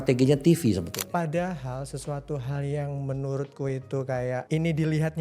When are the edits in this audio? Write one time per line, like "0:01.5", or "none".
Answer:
0:01.0
0:04.4